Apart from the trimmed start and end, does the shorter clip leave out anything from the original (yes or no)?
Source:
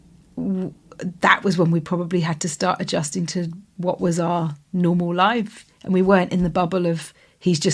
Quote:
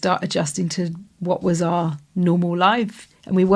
no